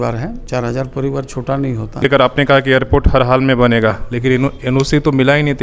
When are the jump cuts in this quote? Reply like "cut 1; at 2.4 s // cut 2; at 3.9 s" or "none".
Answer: cut 1; at 2.0 s